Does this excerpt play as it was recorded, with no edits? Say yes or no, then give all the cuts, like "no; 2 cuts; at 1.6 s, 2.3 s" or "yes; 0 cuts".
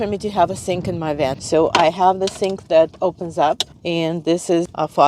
no; 1 cut; at 1.4 s